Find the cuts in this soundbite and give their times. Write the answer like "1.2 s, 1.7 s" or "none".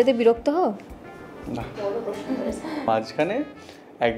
2.9 s